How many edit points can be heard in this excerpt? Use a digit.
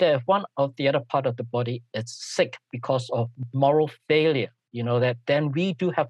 1